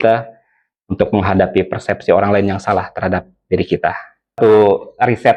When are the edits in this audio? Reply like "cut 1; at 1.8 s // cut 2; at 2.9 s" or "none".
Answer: cut 1; at 4.4 s